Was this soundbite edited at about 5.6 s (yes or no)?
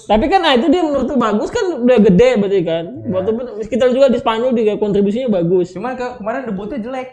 no